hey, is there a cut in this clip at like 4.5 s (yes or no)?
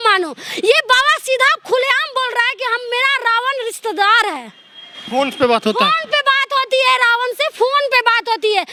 no